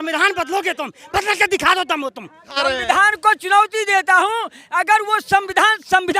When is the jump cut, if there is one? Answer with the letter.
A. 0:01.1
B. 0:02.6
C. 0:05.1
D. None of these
B